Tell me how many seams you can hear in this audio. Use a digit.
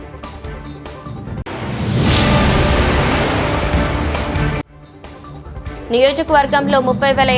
1